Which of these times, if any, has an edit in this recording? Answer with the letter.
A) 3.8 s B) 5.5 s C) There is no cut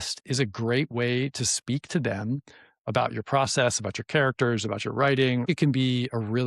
B